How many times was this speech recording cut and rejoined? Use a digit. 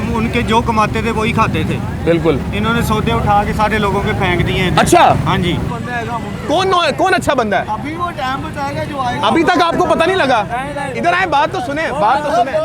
1